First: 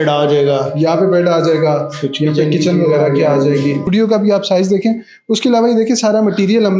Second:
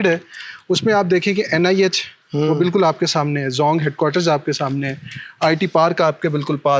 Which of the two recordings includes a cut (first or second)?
first